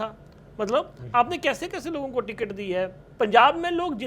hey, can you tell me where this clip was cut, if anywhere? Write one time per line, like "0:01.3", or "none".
0:03.0